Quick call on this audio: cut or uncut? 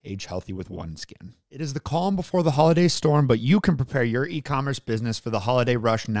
cut